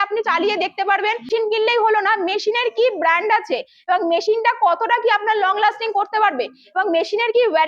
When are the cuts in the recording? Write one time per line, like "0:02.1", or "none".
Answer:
0:01.3